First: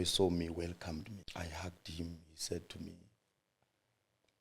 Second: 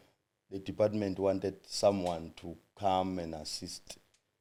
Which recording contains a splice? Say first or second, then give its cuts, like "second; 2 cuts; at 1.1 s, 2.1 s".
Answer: first; 1 cut; at 1.2 s